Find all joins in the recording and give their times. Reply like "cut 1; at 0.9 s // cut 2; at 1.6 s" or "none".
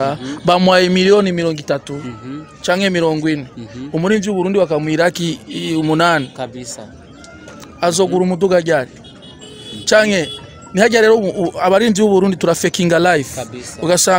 none